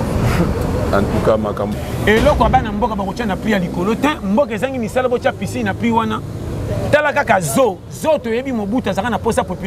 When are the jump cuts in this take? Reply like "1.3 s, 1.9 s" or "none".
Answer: 1.7 s